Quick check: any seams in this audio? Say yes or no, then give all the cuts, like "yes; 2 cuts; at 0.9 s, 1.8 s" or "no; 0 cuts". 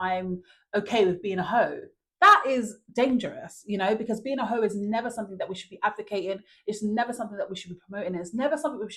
no; 0 cuts